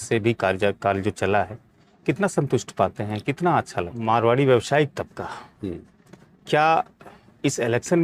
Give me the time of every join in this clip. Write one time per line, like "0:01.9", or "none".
0:04.0